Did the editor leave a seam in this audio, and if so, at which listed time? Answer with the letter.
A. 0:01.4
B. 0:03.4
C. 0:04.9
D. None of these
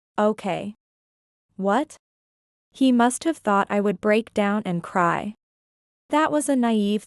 A